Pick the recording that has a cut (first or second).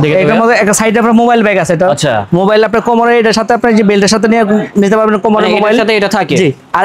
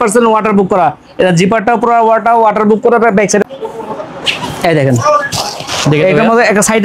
second